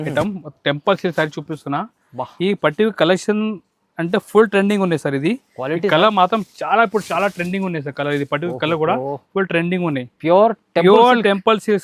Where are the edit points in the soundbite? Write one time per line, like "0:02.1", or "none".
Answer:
none